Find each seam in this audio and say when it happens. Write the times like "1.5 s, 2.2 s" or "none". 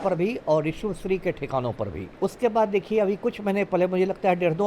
2.0 s